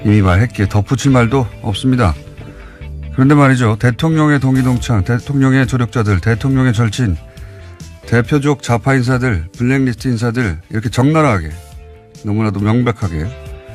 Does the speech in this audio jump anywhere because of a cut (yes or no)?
no